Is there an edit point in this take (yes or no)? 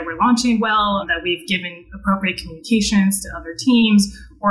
no